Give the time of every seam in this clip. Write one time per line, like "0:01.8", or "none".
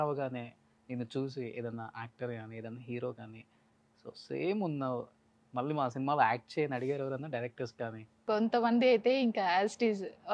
0:08.2